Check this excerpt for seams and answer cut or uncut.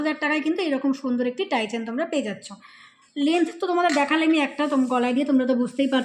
uncut